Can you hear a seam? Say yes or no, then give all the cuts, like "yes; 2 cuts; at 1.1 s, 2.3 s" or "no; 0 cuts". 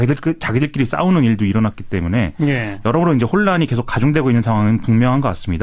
no; 0 cuts